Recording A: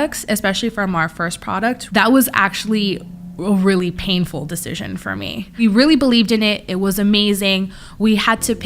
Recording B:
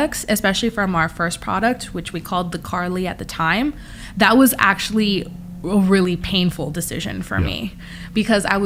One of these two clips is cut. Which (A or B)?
A